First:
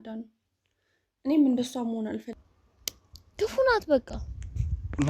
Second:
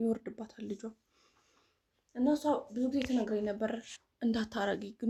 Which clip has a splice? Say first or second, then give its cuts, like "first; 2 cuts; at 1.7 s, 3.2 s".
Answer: first; 1 cut; at 2.3 s